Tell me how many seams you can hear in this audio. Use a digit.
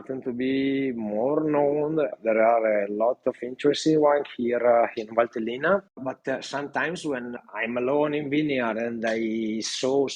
1